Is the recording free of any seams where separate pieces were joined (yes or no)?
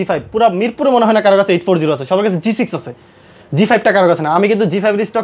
yes